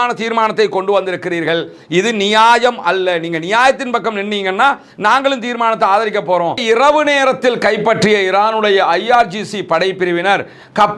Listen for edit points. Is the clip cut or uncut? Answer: cut